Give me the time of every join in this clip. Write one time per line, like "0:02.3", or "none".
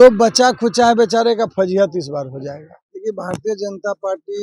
0:02.7